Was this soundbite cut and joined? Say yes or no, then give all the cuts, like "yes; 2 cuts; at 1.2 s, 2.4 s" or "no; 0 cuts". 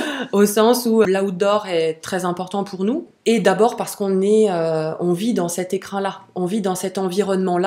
yes; 2 cuts; at 1.1 s, 3.1 s